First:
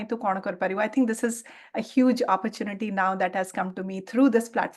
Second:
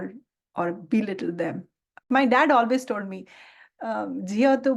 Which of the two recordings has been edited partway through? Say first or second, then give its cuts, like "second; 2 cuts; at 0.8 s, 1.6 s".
second; 1 cut; at 2.0 s